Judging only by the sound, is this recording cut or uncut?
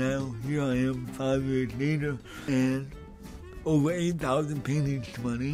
cut